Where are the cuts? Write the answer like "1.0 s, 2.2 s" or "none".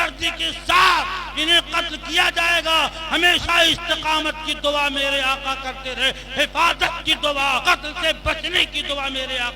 7.6 s